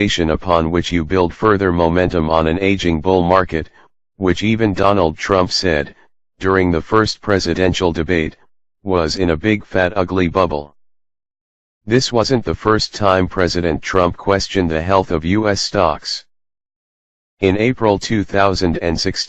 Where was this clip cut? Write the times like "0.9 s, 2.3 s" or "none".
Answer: none